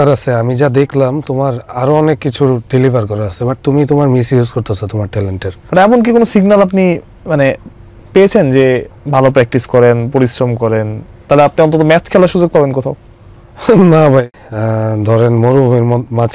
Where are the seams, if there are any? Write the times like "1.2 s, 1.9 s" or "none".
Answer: 5.5 s, 8.9 s, 14.2 s